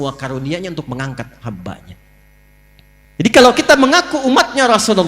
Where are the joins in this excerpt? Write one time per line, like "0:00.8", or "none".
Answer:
0:03.2